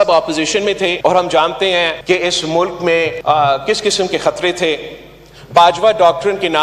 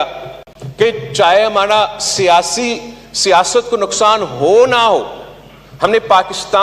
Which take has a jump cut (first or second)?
first